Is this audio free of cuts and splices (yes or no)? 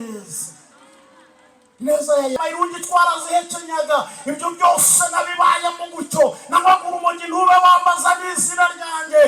no